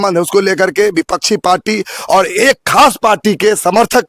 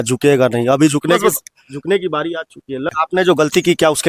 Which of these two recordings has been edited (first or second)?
second